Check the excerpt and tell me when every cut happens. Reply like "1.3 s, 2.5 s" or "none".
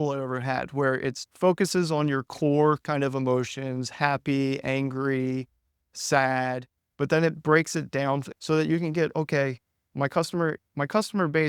1.2 s, 8.3 s